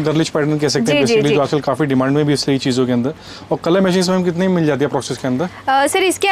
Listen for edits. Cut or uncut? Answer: uncut